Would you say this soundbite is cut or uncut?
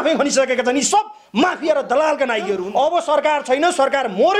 cut